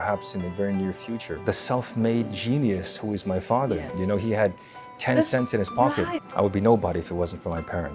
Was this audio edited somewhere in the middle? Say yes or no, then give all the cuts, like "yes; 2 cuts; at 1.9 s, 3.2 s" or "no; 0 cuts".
yes; 2 cuts; at 1.4 s, 6.2 s